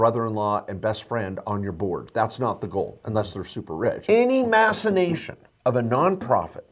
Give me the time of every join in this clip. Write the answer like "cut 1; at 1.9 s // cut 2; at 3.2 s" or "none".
cut 1; at 4.0 s